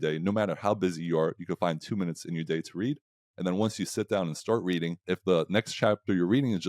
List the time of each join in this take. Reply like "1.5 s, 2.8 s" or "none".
5.0 s

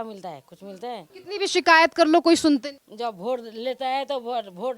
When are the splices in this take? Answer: 1.1 s, 2.8 s

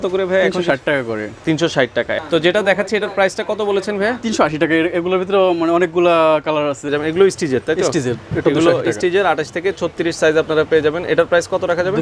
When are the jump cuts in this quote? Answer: 2.2 s, 6.9 s

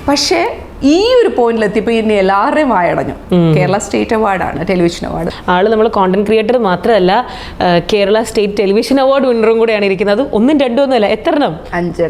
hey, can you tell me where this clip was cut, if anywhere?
5.3 s

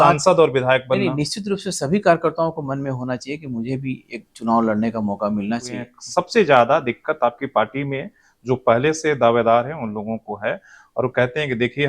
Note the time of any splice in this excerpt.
6.0 s

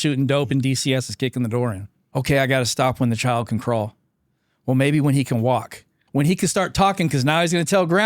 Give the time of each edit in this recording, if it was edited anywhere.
2.1 s, 5.9 s

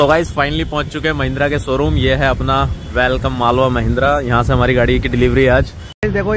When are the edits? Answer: none

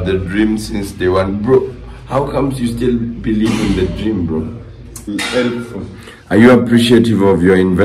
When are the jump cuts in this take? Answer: 5.1 s

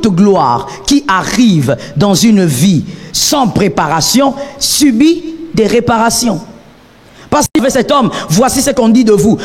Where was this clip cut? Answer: 7.6 s

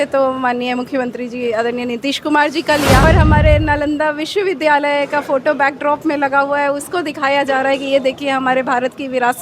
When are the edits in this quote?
3.0 s

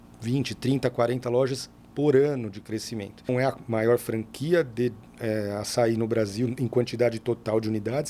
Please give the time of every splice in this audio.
3.3 s

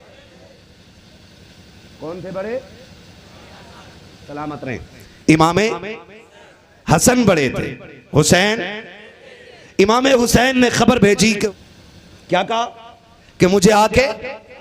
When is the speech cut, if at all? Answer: 11.5 s

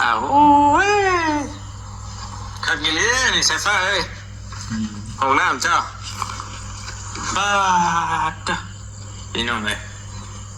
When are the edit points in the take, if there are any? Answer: none

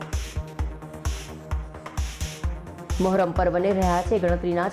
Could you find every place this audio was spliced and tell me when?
1.0 s

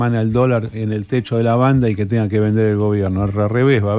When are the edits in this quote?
none

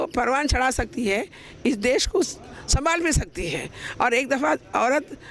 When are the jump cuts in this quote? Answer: none

